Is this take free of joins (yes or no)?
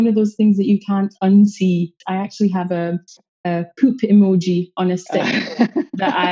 no